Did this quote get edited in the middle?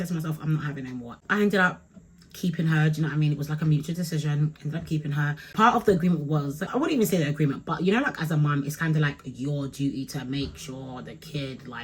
no; 0 cuts

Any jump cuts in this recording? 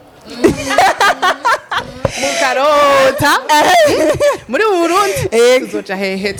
no; 0 cuts

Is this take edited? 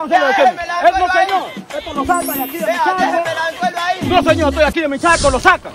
no; 0 cuts

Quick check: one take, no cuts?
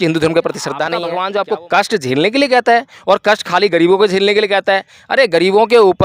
no; 1 cut; at 1.0 s

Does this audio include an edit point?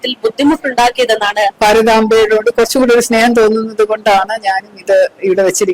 yes; 1 cut; at 1.5 s

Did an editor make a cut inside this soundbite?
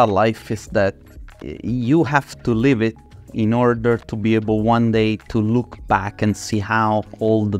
no; 0 cuts

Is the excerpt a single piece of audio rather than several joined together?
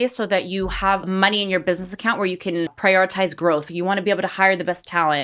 no; 2 cuts; at 1.0 s, 2.7 s

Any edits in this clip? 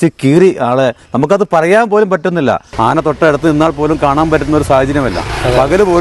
yes; 1 cut; at 2.7 s

